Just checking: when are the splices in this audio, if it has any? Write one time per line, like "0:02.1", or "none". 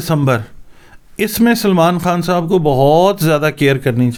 none